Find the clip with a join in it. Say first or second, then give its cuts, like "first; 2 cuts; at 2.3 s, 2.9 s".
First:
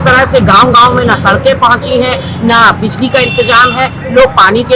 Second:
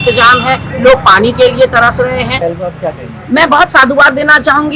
second; 1 cut; at 2.4 s